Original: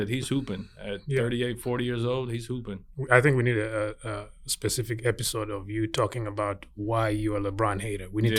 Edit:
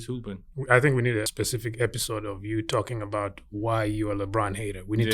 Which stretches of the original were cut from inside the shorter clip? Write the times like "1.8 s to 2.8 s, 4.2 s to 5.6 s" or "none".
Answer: 3.7 s to 4.5 s